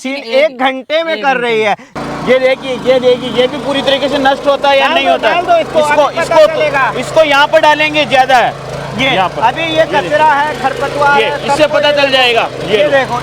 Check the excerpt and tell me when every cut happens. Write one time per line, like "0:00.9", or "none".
0:01.9